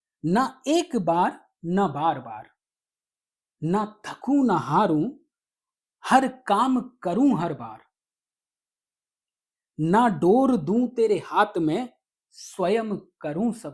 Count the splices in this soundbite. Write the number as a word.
zero